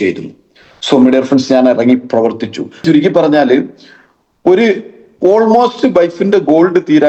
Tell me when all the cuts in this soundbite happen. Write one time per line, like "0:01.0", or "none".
0:02.8